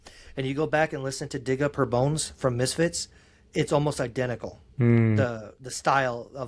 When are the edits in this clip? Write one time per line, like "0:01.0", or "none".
none

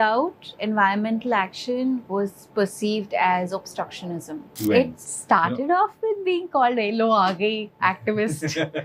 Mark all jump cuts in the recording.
0:04.5

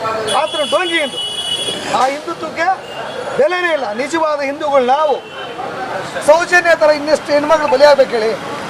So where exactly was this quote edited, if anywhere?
0:06.1

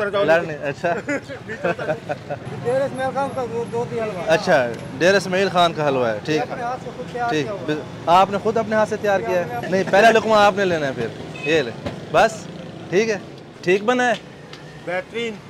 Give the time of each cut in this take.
none

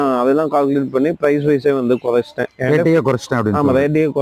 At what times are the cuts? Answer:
none

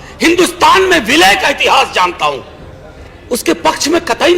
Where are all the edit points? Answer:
0:03.0

